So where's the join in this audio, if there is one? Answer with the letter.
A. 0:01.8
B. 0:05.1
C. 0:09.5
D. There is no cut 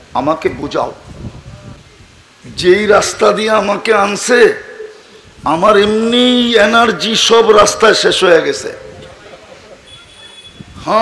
A